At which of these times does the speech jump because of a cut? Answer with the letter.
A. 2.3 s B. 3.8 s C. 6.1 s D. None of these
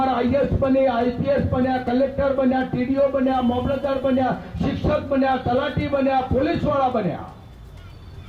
D